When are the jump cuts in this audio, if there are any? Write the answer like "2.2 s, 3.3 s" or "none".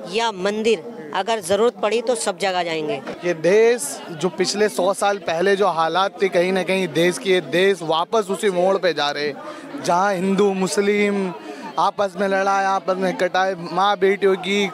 3.1 s

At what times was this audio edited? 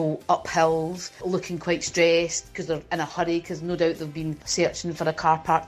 1.2 s, 4.4 s

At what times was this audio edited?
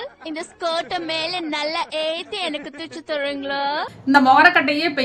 3.8 s

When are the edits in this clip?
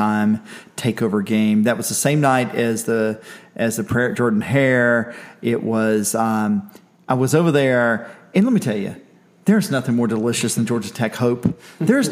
none

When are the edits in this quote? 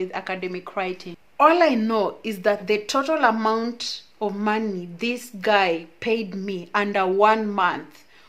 1.1 s

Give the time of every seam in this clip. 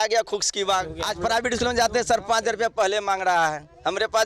1.0 s

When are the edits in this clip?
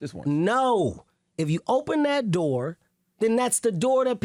none

